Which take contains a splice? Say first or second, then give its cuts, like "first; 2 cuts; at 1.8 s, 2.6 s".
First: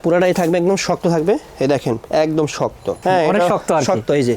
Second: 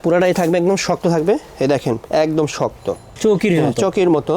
first; 1 cut; at 3.0 s